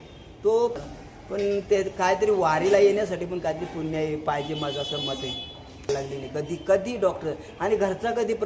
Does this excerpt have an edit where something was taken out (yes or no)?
yes